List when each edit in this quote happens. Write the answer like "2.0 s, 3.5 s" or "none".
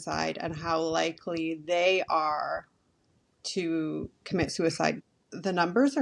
5.0 s